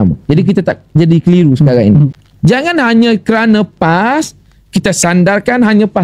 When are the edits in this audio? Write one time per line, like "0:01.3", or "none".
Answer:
0:02.2